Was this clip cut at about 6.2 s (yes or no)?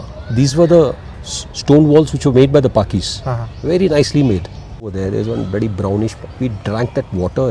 no